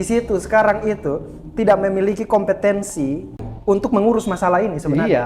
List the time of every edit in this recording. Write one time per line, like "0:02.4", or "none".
0:03.5